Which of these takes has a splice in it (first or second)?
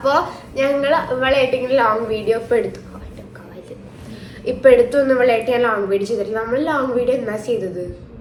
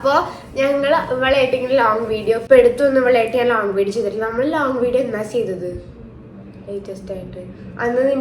second